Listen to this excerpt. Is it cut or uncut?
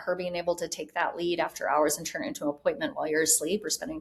uncut